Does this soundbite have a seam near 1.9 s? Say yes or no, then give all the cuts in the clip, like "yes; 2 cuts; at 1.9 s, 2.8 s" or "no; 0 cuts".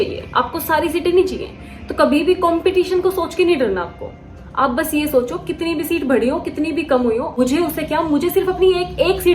no; 0 cuts